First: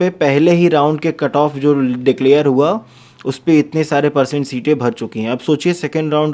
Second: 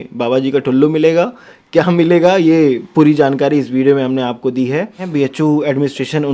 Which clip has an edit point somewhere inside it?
second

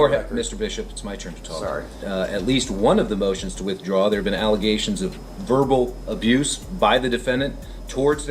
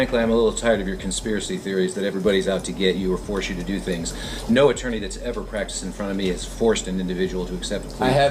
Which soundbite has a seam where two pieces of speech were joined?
first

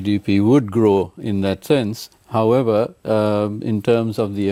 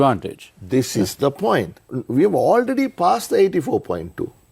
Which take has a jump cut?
second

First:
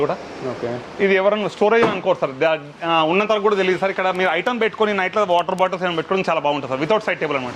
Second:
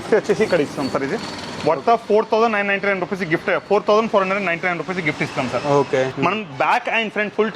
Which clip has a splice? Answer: second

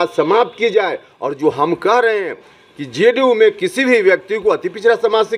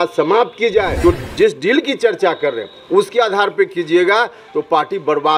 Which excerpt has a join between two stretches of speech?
second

